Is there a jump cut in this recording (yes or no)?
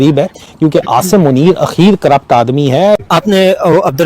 yes